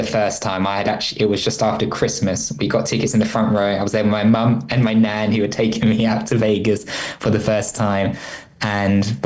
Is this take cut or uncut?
uncut